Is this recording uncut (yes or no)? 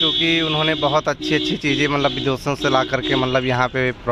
yes